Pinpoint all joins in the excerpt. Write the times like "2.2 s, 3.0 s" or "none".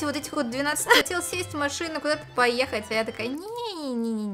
1.0 s